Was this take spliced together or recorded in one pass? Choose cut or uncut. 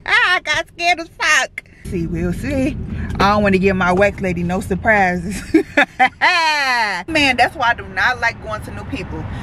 cut